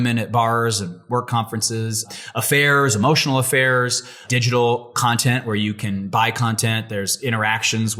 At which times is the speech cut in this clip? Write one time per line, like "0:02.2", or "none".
0:02.1
0:04.2